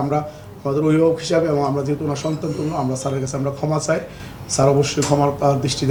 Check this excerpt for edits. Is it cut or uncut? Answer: uncut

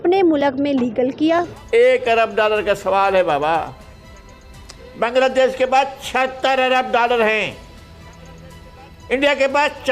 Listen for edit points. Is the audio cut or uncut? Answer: cut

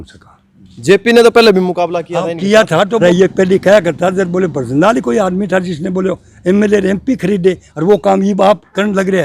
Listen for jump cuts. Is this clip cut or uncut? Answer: cut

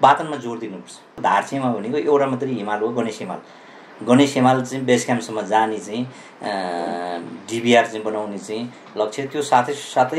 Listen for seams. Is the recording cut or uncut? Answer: cut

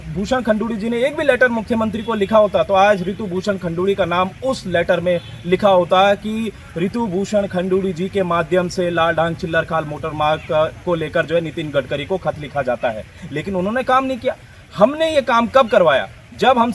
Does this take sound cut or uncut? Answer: uncut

